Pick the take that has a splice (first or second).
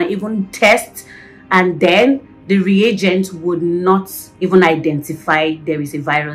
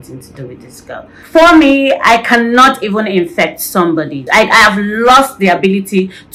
second